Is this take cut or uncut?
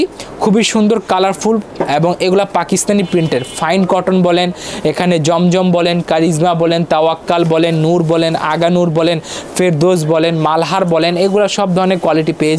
uncut